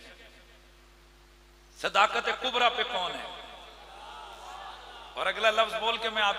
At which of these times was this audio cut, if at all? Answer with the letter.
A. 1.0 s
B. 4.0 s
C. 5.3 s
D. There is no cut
D